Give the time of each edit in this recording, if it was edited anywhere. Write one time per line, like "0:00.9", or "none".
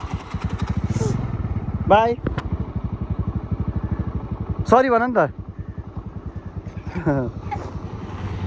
none